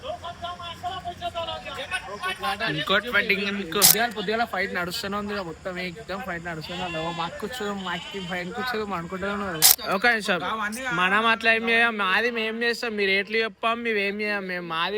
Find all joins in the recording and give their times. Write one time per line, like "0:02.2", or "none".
0:03.9
0:09.7